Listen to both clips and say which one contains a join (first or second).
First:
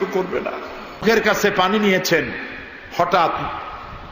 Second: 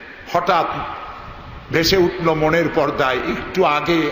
first